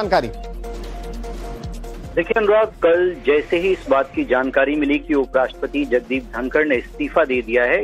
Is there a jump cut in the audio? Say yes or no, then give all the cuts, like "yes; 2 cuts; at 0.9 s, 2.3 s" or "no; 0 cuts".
yes; 1 cut; at 1.0 s